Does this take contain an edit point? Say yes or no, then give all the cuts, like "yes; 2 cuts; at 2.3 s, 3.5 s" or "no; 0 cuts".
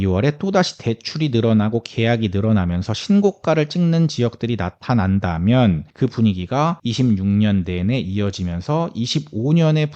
yes; 2 cuts; at 5.9 s, 6.8 s